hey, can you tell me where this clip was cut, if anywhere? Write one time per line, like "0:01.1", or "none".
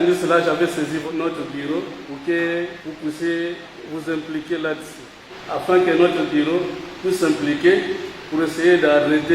0:01.0
0:02.0
0:02.8
0:03.7
0:05.3
0:06.8